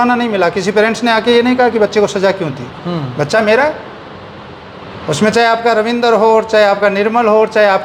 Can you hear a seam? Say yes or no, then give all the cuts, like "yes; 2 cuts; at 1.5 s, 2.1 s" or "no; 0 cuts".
no; 0 cuts